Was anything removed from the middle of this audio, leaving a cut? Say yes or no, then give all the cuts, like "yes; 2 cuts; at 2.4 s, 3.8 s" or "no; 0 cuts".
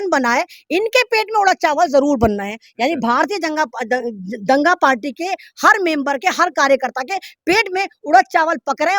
no; 0 cuts